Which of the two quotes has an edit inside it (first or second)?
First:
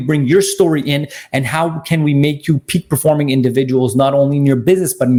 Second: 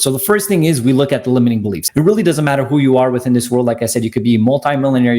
second